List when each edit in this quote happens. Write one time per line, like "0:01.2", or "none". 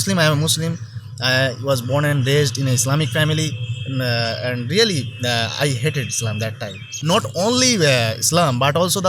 0:06.9

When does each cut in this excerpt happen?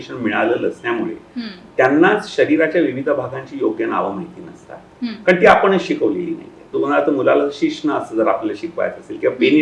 0:06.7

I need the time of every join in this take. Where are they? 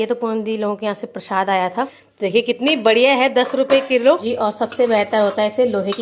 0:02.0
0:04.3

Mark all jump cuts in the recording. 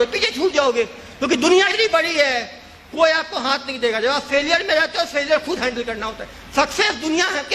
0:01.7

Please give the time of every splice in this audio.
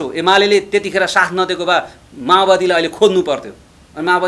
none

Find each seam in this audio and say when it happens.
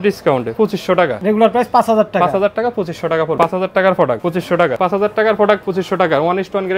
0:01.0
0:03.4
0:04.8
0:05.7

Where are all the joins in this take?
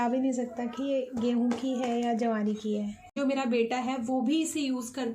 0:03.2

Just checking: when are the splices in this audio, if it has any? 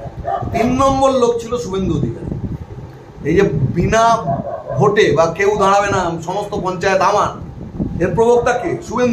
none

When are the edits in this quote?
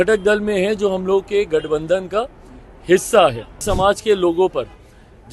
0:03.6

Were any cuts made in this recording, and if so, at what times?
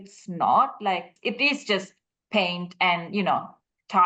0:01.1

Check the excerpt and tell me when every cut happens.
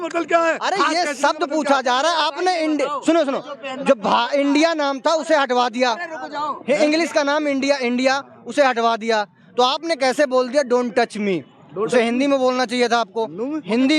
none

